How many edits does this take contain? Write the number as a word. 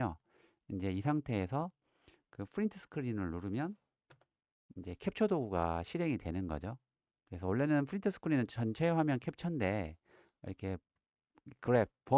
zero